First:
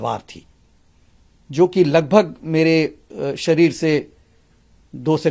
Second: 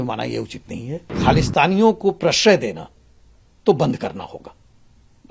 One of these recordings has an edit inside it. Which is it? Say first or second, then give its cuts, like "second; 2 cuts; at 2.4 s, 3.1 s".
second; 1 cut; at 1.2 s